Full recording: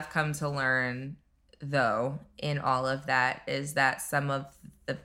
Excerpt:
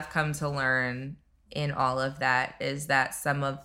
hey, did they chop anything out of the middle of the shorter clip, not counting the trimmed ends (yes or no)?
yes